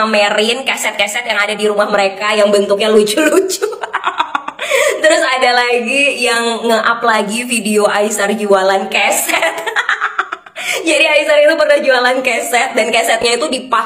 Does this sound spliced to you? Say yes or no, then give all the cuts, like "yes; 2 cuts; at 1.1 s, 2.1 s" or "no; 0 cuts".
no; 0 cuts